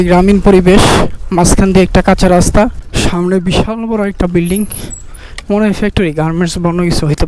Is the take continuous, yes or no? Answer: no